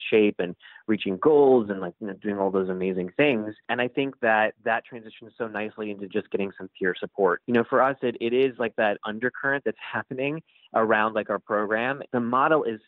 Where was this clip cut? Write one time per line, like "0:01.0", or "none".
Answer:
0:03.6
0:07.4
0:09.0
0:12.0